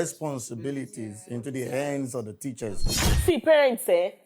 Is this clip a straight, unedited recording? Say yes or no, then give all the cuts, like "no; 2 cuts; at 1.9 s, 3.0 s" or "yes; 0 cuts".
no; 1 cut; at 3.0 s